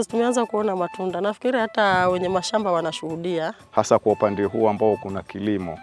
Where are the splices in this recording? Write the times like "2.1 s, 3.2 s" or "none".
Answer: 3.6 s